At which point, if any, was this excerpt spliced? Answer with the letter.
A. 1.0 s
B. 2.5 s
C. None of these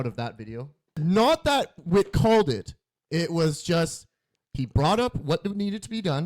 A